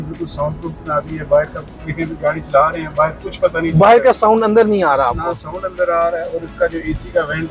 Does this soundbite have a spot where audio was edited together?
no; 0 cuts

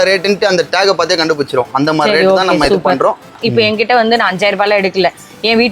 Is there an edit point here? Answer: yes; 1 cut; at 3.4 s

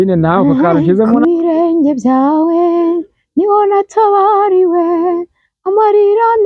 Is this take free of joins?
no; 1 cut; at 1.1 s

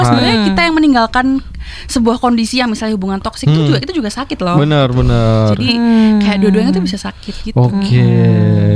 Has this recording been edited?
no; 0 cuts

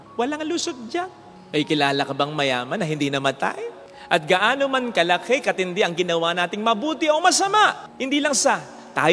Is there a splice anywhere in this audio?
no; 0 cuts

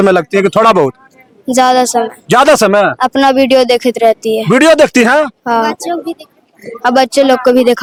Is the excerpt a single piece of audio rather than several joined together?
yes; 0 cuts

